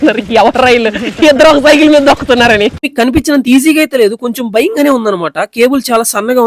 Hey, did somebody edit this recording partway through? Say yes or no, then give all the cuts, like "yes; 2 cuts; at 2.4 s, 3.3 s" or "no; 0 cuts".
yes; 1 cut; at 2.9 s